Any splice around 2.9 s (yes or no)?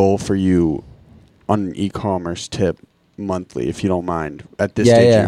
no